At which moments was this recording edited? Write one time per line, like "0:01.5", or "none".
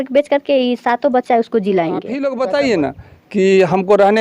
0:02.2